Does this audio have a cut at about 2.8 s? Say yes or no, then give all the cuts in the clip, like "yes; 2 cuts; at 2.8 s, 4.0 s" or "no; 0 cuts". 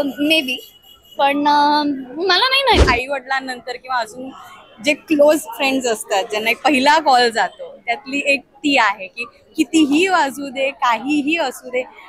yes; 1 cut; at 2.8 s